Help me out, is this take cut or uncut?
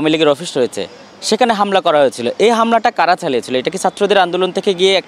uncut